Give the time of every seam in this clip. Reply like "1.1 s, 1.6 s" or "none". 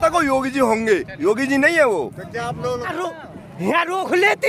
2.9 s